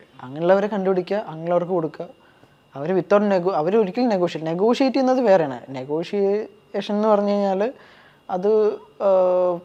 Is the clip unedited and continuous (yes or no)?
yes